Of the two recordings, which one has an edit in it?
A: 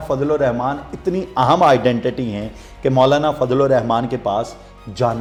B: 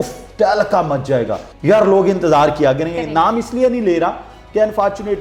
B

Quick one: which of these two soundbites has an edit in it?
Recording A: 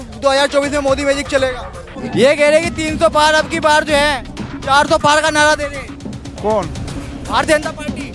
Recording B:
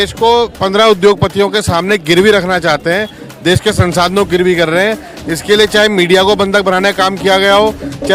A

